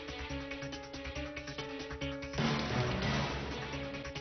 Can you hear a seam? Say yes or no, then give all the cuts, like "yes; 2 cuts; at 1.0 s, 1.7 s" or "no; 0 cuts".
no; 0 cuts